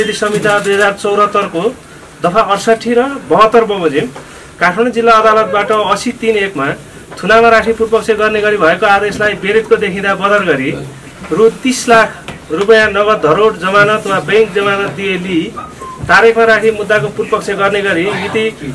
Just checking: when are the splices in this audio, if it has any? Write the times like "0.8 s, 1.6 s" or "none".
none